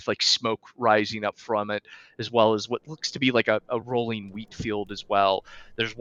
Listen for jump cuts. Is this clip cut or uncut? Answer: uncut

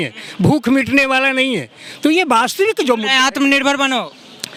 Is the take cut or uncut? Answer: uncut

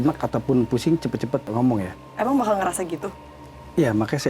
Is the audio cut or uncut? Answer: uncut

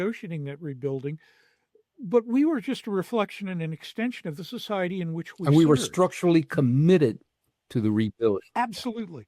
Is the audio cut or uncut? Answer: uncut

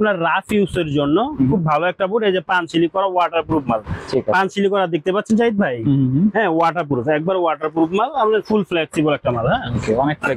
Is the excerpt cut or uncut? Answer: uncut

